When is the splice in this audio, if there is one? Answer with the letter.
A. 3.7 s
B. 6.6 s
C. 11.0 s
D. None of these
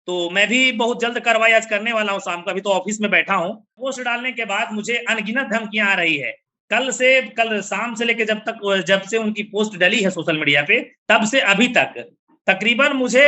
A